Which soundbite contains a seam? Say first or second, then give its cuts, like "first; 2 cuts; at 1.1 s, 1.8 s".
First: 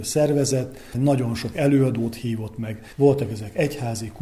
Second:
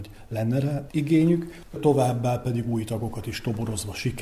second; 2 cuts; at 0.8 s, 1.8 s